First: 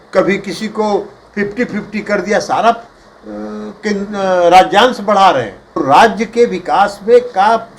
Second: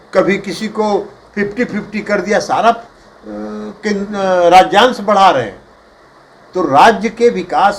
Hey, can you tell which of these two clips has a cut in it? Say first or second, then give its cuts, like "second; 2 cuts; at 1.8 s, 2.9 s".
first; 1 cut; at 5.6 s